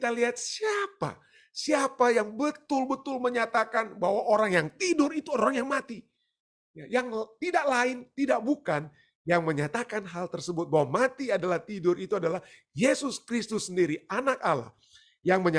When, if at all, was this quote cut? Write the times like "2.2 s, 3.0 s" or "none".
none